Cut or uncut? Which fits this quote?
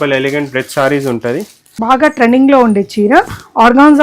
cut